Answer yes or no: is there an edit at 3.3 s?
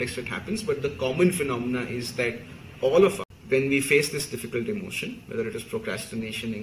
yes